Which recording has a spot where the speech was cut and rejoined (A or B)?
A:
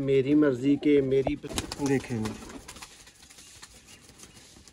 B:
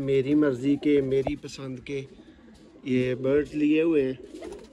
A